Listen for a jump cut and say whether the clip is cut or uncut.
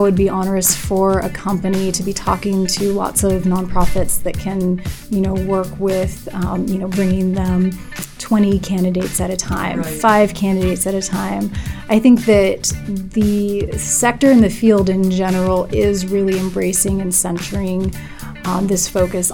uncut